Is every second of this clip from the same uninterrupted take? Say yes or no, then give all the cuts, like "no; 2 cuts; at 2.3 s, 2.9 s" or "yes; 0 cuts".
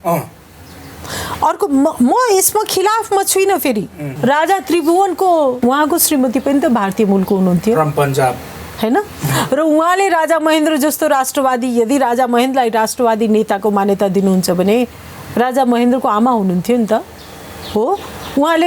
no; 2 cuts; at 4.0 s, 5.6 s